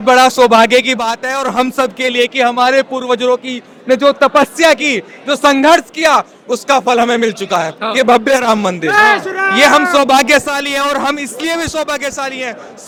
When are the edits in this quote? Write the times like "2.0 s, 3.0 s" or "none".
none